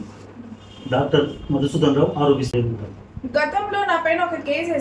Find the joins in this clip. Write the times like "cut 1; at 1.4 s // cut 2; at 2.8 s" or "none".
cut 1; at 2.5 s

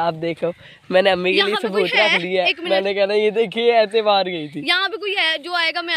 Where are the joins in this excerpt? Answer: none

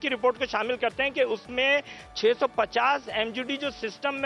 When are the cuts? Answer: none

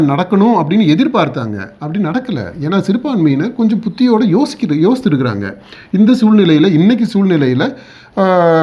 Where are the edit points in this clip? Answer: none

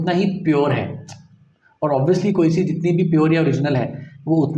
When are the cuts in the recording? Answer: none

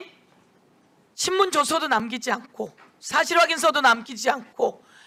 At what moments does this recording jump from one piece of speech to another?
none

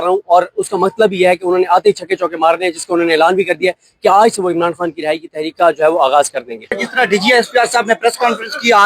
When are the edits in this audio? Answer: cut 1; at 6.6 s

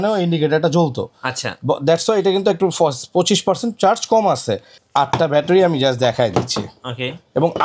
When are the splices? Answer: cut 1; at 4.7 s

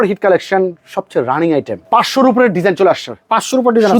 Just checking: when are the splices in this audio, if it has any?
cut 1; at 1.8 s

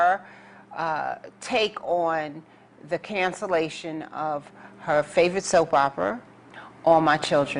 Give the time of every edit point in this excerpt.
cut 1; at 4.3 s

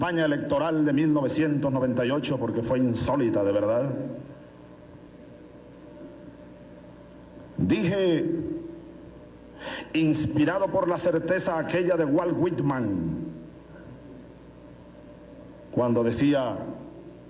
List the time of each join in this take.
cut 1; at 13.4 s

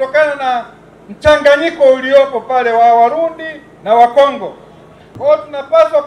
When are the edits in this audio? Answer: cut 1; at 5.1 s

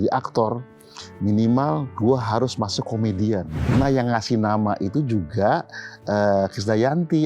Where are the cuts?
cut 1; at 3.6 s

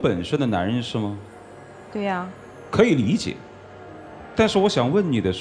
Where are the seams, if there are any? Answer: none

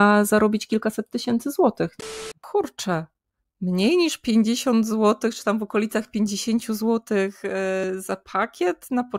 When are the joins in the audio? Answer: cut 1; at 1.9 s // cut 2; at 7.9 s

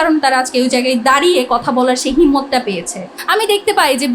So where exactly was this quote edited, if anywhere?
cut 1; at 3.1 s

